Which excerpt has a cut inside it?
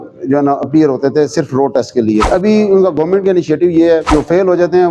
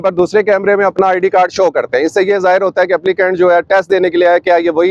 first; 2 cuts; at 2.3 s, 4.1 s

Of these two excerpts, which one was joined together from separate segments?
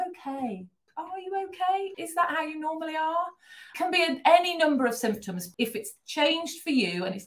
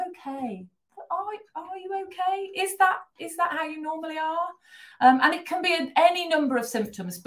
first; 4 cuts; at 0.9 s, 1.9 s, 3.7 s, 5.4 s

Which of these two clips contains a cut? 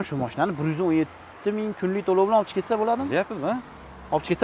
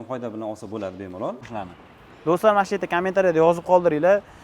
second; 1 cut; at 1.4 s

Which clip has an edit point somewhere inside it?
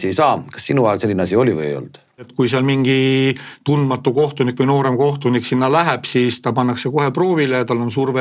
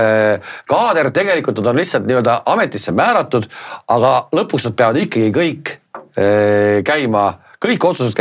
first; 1 cut; at 2.3 s

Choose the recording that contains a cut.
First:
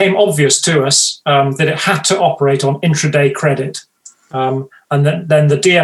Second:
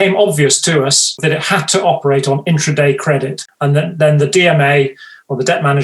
second; 2 cuts; at 1.2 s, 3.4 s

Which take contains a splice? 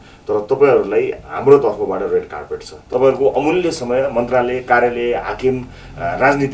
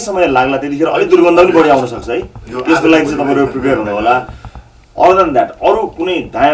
first; 1 cut; at 2.7 s

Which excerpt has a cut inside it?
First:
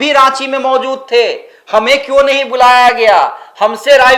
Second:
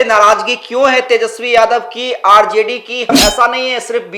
second; 1 cut; at 3.1 s

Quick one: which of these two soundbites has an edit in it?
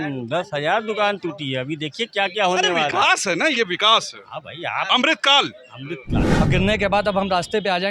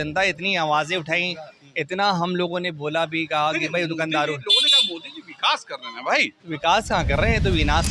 first; 1 cut; at 6.2 s

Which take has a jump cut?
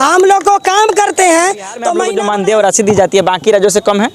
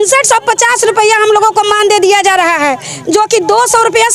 first; 1 cut; at 2.0 s

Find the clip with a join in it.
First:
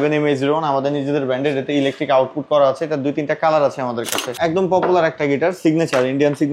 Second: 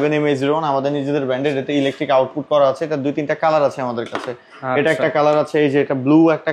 first; 1 cut; at 4.4 s

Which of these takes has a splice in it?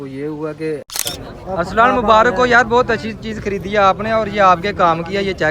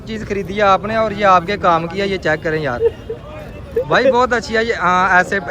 first; 1 cut; at 0.9 s

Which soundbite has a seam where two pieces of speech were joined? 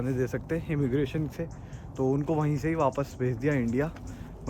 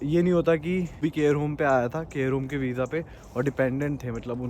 second; 1 cut; at 1.0 s

